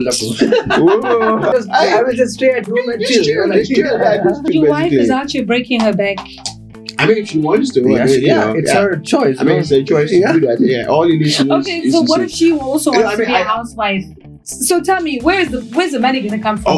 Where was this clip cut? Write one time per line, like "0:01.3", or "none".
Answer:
0:01.5
0:04.5